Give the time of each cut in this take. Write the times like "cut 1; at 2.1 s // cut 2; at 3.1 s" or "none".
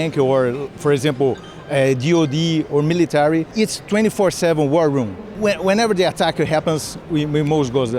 cut 1; at 5.3 s